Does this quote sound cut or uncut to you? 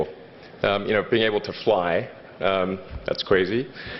cut